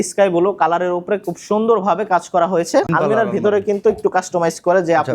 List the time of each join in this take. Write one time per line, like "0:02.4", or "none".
0:02.9